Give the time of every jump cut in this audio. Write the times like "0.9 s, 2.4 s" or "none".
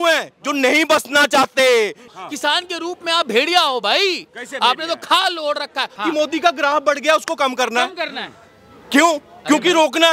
2.1 s, 5.9 s

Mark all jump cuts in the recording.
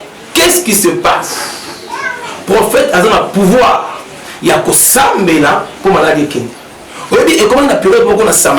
none

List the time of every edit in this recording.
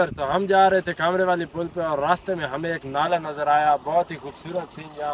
none

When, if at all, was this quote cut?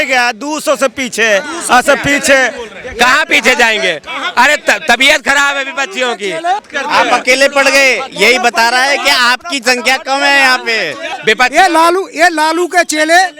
6.6 s, 11.2 s

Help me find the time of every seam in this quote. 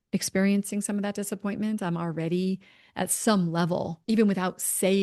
3.9 s

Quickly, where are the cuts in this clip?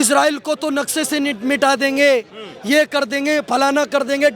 none

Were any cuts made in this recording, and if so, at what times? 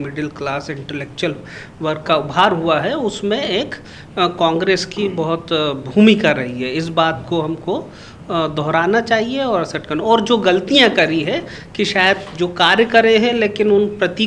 none

